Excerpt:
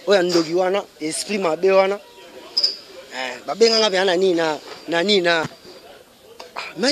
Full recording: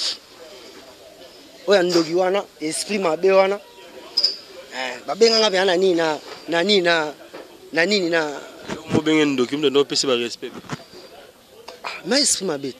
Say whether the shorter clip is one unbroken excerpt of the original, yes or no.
no